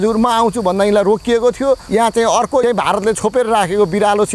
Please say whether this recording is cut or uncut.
cut